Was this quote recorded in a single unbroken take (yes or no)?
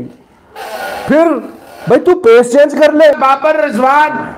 no